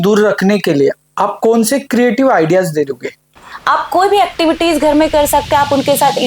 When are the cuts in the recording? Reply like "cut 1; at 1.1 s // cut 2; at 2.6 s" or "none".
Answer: cut 1; at 3.5 s